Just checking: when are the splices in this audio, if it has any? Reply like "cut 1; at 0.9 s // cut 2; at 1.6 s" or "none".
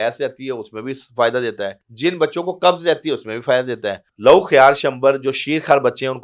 cut 1; at 1.8 s // cut 2; at 4.1 s